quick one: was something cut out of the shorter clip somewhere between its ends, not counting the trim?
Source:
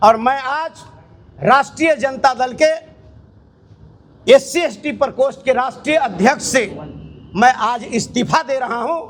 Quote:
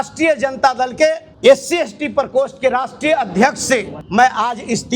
yes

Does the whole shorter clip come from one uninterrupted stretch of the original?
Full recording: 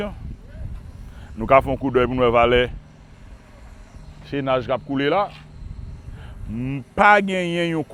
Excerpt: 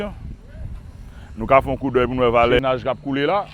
no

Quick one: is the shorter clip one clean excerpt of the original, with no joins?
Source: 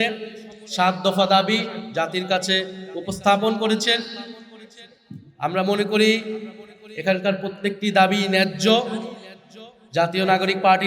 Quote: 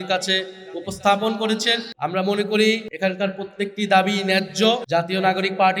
no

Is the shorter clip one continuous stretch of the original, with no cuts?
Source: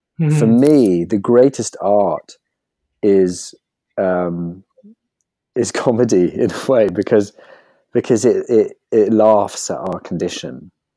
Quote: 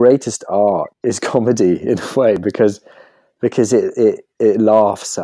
no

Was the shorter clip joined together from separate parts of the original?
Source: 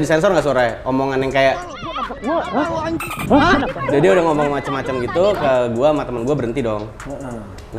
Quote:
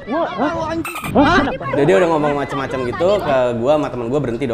no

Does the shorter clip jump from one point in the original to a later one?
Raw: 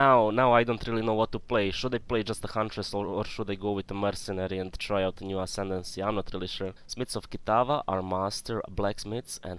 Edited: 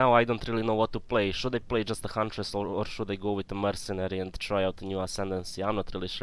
no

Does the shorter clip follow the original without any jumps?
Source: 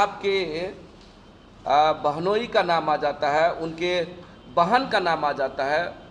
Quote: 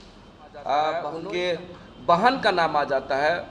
no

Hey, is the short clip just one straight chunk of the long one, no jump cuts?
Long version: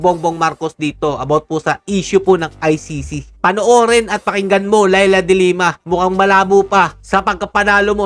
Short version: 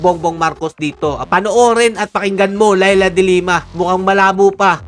no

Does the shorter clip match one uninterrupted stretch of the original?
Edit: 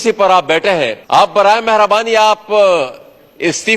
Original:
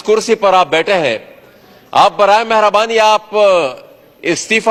no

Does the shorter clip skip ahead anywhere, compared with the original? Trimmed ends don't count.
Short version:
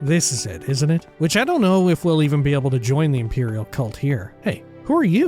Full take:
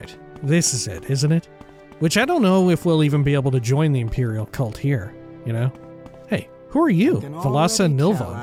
yes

